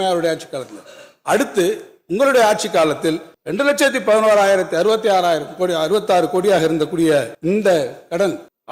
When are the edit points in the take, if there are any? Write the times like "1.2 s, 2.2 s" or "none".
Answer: 7.3 s